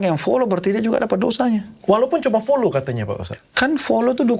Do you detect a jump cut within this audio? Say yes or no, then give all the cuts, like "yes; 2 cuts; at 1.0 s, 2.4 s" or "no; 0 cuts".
no; 0 cuts